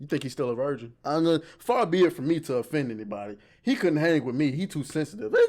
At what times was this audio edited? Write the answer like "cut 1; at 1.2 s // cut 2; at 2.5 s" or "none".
cut 1; at 0.9 s

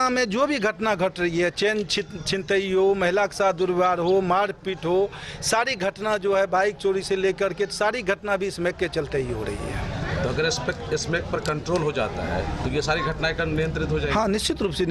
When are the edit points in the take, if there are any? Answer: none

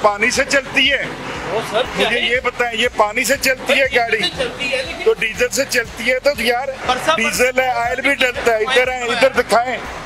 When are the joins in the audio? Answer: none

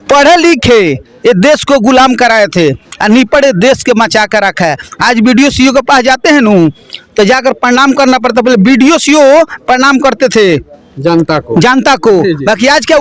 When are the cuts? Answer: none

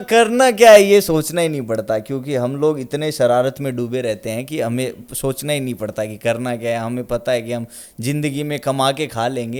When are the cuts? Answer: none

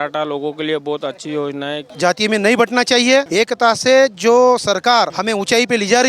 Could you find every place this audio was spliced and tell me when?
cut 1; at 1.8 s // cut 2; at 3.3 s // cut 3; at 5.2 s

